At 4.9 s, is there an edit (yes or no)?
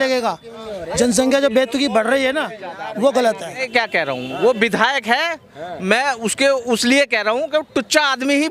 no